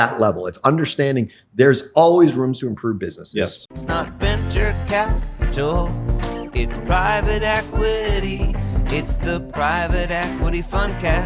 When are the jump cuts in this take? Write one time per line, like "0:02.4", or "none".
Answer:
0:03.6